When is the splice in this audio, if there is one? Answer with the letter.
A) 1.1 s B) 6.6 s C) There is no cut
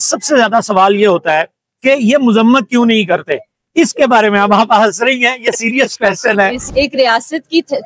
B